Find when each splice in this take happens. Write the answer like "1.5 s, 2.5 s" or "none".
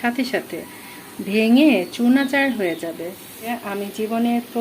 3.5 s